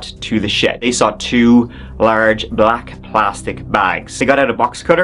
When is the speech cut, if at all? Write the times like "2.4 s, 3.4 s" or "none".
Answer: 0.8 s, 4.1 s

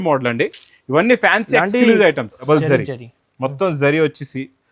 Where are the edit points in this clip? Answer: 2.5 s

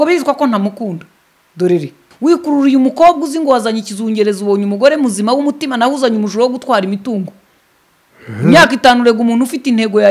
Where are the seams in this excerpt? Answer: 2.0 s

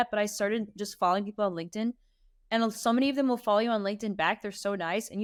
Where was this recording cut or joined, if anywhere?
none

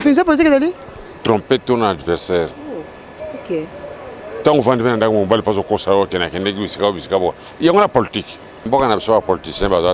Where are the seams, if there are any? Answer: 8.7 s

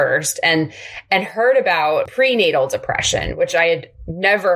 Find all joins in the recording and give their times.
2.1 s

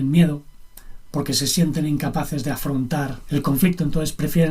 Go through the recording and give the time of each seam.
3.2 s

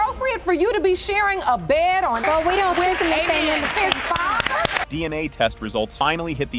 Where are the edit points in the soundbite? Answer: none

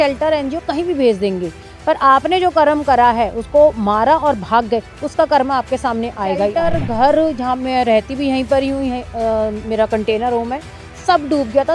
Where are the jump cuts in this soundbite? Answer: 6.6 s

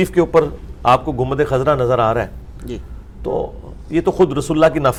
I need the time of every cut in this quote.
none

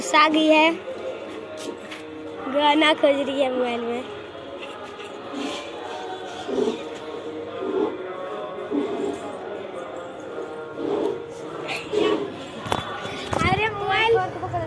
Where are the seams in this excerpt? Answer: none

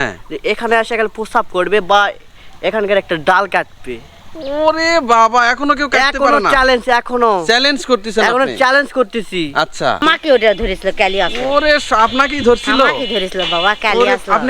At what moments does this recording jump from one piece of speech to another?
10.0 s

